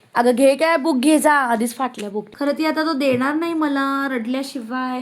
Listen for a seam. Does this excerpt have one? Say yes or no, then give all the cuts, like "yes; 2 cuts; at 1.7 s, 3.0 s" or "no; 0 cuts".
yes; 1 cut; at 2.2 s